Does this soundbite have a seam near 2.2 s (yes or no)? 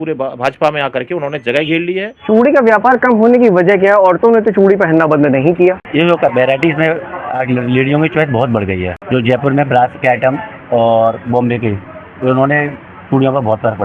yes